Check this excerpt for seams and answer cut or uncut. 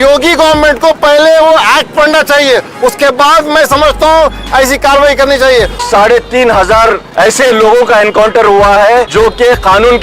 cut